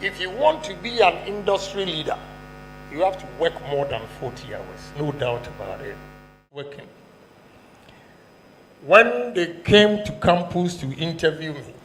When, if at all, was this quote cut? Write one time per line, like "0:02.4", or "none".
0:06.4

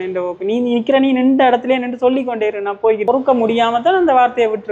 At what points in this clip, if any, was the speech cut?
0:03.0

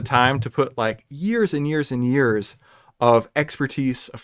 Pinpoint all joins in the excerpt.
none

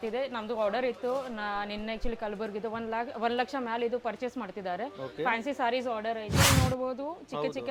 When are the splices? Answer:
0:06.3

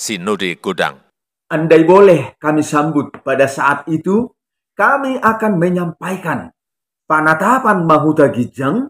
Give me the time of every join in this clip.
0:01.0

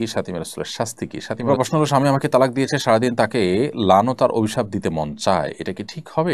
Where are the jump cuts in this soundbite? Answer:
0:01.4

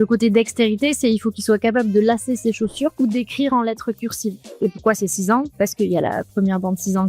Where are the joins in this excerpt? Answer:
0:02.9
0:04.5

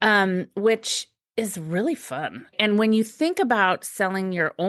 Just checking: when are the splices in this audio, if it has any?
0:02.6

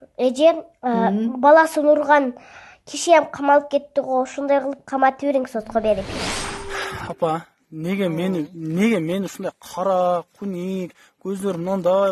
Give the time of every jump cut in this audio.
0:06.1

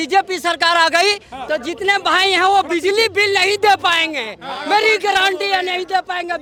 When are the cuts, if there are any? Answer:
none

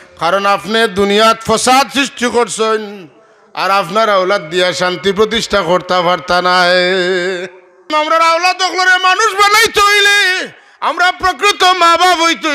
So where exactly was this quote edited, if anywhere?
0:07.9

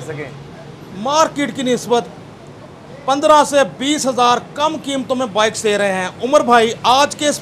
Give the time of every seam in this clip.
none

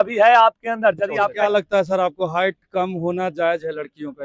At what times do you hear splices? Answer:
0:01.4

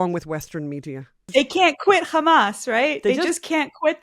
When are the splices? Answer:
0:01.3

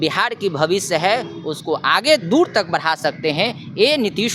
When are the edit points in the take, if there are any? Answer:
none

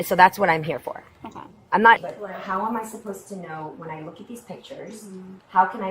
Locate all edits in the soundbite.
0:02.0

